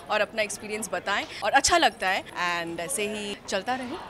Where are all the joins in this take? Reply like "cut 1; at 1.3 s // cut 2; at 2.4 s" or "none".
none